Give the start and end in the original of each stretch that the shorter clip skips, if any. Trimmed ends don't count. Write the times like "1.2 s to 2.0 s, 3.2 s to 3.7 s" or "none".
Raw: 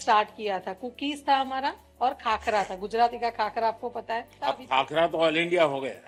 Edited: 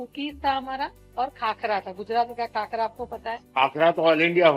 4.3 s to 4.6 s